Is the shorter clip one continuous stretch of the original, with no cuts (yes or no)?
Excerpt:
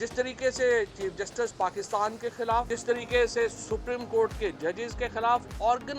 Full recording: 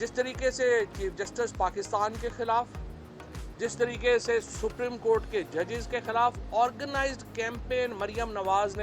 no